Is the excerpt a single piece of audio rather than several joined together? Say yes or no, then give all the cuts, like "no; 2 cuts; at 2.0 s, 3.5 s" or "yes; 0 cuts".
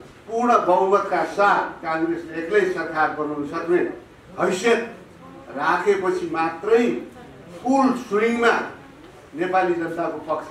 yes; 0 cuts